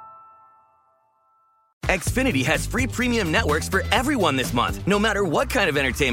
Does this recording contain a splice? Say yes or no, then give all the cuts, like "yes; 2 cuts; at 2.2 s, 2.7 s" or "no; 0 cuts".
no; 0 cuts